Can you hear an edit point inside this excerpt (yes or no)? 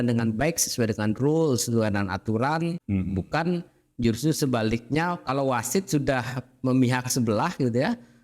yes